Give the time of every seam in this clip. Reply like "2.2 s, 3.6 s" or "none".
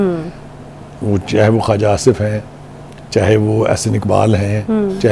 none